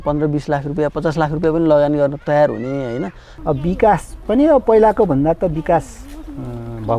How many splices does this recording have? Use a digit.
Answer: 1